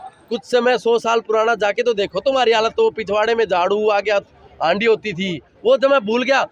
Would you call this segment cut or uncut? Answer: uncut